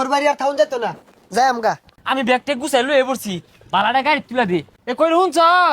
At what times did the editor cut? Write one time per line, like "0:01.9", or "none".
0:01.9
0:04.7